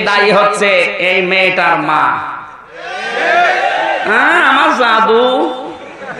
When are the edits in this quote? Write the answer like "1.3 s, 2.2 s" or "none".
none